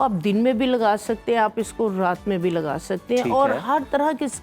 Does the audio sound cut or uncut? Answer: uncut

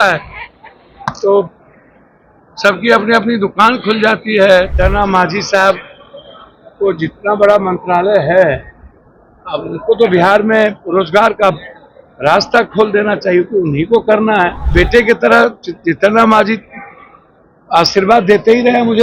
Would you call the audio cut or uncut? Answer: cut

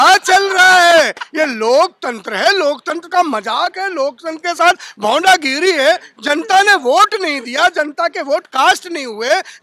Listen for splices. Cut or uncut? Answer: uncut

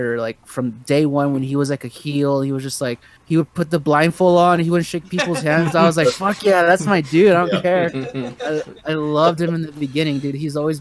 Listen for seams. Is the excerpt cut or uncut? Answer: uncut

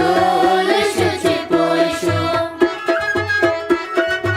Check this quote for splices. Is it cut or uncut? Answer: uncut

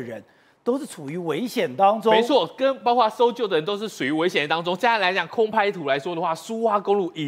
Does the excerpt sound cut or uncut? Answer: uncut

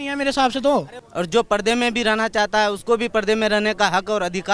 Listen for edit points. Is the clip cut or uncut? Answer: cut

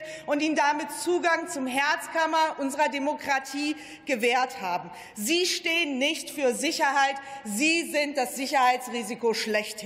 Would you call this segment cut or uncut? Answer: uncut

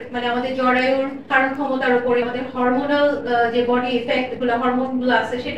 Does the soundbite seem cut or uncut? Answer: uncut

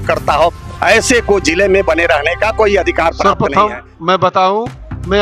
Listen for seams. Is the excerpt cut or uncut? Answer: cut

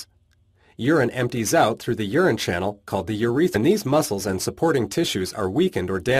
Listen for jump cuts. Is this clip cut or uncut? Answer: uncut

